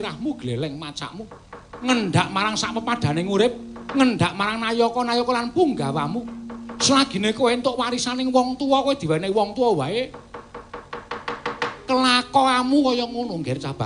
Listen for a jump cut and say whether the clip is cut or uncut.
cut